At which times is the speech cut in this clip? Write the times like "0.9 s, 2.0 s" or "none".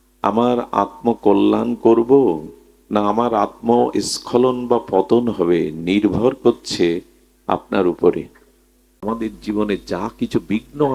8.9 s